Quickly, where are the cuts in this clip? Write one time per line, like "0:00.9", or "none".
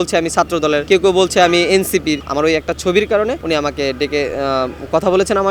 0:00.8
0:02.2
0:03.4